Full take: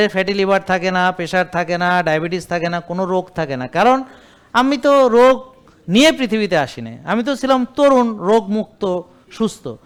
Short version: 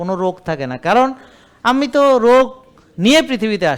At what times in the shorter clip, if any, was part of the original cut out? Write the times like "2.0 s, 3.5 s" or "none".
none

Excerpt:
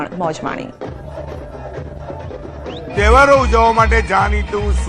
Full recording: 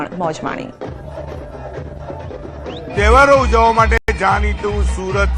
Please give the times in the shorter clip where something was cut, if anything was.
4.0 s

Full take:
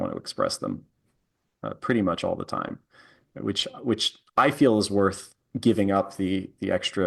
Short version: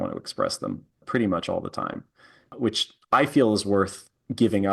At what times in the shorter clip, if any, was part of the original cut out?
0.9 s, 2.4 s

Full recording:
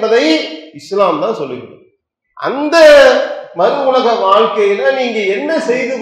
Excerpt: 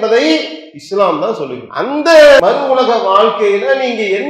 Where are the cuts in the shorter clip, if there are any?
1.6 s, 2.4 s

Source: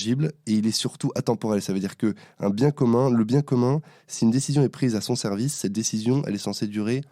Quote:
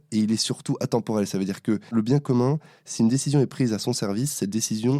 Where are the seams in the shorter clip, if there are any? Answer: 1.9 s

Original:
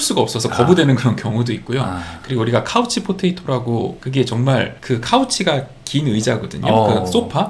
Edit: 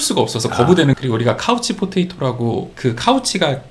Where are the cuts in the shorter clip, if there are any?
1.0 s, 2.7 s

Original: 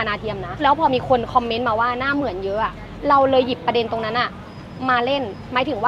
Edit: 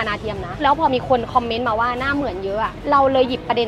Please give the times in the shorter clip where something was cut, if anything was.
2.8 s

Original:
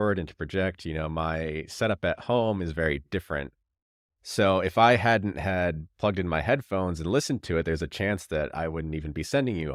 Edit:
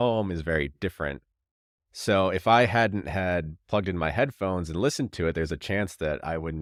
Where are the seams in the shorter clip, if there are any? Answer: none

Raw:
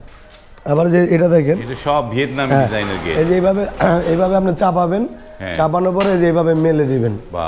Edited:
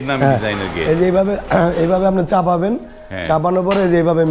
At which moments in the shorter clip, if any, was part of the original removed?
none

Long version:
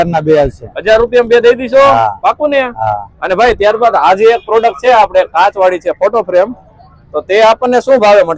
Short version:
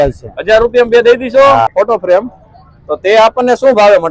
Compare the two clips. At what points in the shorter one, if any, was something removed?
1.7 s

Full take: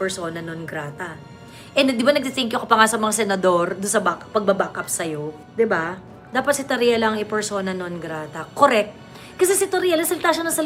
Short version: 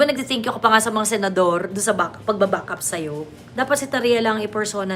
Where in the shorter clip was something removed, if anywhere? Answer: 3.3 s

